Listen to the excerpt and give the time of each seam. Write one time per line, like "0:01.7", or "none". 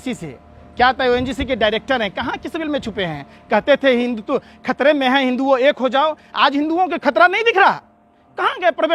none

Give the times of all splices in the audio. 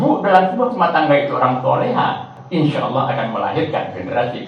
0:02.4

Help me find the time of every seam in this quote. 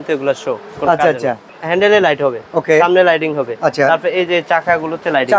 0:01.5
0:02.4

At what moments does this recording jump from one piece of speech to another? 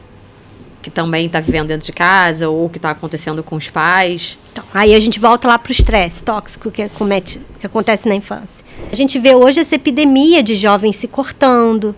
0:08.9

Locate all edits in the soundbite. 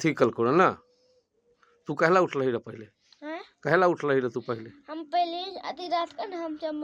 none

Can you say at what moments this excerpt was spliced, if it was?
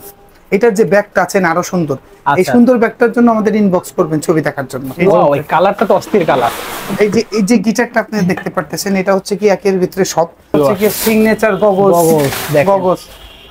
0:04.8
0:10.5

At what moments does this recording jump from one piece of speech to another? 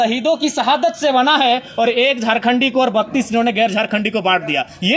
none

